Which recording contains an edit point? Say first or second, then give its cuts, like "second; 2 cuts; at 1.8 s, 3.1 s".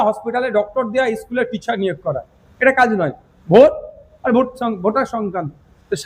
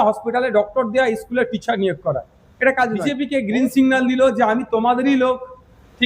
second; 1 cut; at 3.2 s